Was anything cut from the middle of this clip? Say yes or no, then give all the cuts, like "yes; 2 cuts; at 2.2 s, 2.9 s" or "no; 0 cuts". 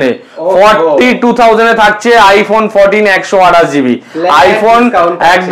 no; 0 cuts